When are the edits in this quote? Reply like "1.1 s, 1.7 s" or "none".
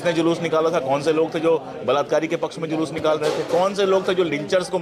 none